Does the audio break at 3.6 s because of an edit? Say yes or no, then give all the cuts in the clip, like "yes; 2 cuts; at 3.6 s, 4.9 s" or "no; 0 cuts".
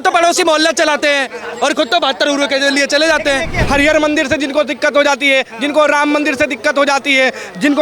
yes; 1 cut; at 3.6 s